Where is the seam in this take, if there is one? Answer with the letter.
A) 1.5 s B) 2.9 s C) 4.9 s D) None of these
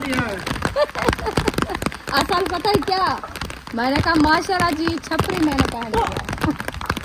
D